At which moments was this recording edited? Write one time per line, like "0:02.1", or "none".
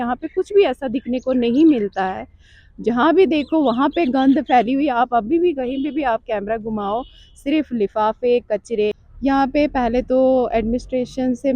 0:09.1